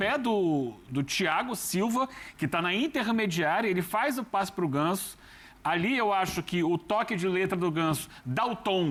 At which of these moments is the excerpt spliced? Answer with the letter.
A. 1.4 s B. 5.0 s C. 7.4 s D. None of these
D